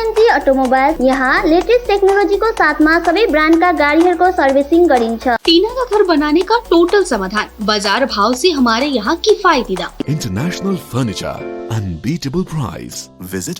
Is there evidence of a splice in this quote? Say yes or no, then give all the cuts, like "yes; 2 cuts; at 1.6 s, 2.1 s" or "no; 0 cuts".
yes; 3 cuts; at 1.0 s, 5.4 s, 10.0 s